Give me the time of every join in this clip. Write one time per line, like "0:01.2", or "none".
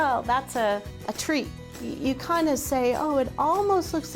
0:01.6